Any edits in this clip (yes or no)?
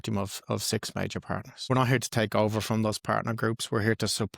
yes